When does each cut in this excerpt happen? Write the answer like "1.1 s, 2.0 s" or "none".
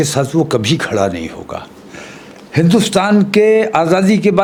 none